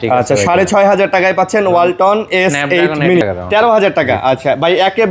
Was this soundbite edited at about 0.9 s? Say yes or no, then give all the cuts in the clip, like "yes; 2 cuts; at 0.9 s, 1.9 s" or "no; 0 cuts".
no; 1 cut; at 3.2 s